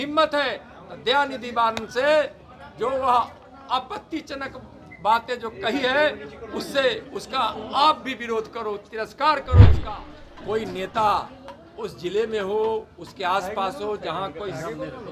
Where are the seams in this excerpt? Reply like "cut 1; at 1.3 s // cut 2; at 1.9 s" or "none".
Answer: cut 1; at 9.8 s